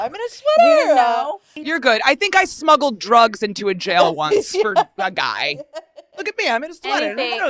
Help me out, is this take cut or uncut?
cut